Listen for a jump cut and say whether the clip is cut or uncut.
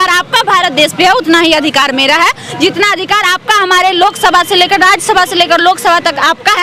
uncut